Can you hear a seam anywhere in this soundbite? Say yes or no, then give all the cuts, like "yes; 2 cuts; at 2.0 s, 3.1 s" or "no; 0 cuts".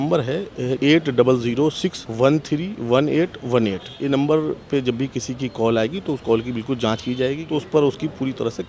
yes; 4 cuts; at 0.8 s, 2.0 s, 3.9 s, 7.4 s